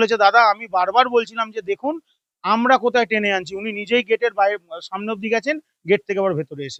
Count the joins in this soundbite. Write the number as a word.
zero